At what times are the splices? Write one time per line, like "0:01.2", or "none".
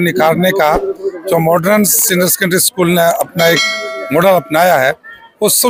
none